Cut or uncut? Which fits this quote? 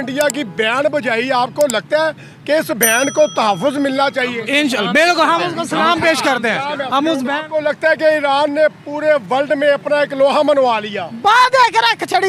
cut